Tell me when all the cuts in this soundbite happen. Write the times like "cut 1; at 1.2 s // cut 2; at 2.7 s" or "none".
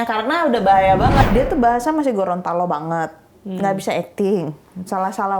cut 1; at 1.3 s